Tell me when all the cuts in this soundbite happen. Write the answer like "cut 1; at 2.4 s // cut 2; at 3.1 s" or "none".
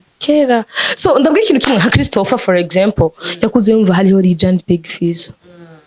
none